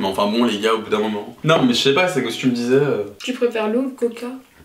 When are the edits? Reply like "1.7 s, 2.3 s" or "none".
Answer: 1.4 s